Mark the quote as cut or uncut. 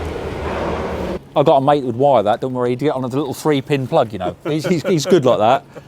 cut